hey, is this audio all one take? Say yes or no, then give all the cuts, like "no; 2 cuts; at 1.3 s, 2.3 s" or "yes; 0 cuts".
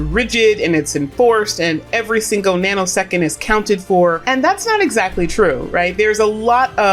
no; 1 cut; at 4.2 s